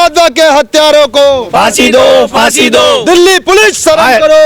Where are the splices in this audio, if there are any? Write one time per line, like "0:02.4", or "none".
none